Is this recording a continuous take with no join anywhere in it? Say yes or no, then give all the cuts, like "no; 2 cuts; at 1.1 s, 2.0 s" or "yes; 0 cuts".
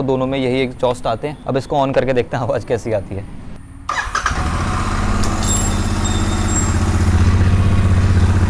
yes; 0 cuts